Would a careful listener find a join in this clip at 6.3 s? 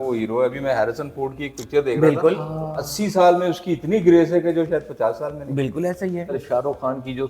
yes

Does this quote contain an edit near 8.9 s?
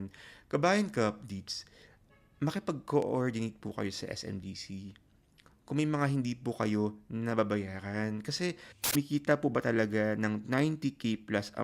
yes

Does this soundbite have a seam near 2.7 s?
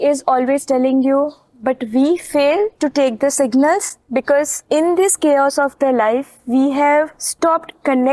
yes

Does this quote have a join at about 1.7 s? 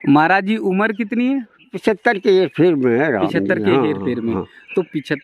yes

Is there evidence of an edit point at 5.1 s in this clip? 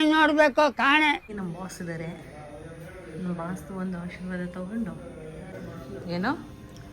no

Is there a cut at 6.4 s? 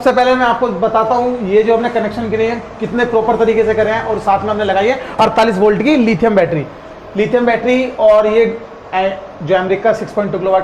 no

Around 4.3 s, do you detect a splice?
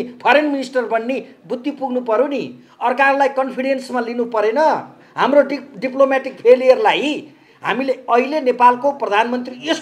no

